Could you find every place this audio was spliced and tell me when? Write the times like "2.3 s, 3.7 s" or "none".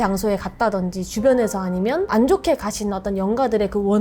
2.1 s